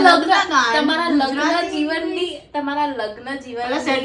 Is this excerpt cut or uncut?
uncut